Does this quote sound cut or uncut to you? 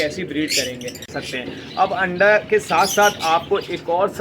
cut